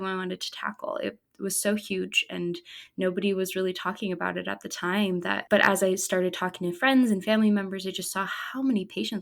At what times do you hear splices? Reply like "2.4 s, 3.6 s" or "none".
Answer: 5.4 s